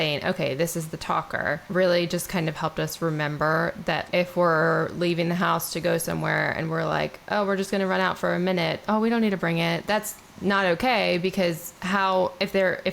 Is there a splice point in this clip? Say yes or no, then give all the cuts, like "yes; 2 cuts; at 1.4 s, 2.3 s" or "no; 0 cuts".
yes; 3 cuts; at 1.6 s, 4.0 s, 9.8 s